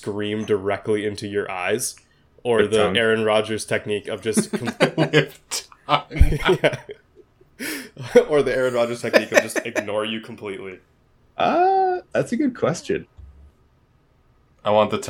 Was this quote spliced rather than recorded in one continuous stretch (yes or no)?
yes